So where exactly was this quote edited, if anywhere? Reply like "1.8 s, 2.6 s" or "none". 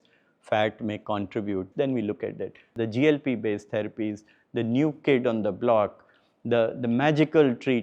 1.7 s, 2.7 s